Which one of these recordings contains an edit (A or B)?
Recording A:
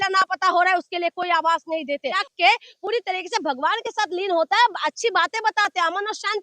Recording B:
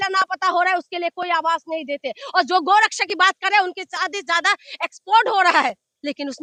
A